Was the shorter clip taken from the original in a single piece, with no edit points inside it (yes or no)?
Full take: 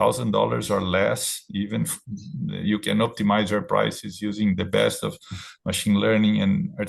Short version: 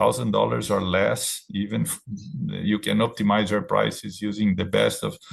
yes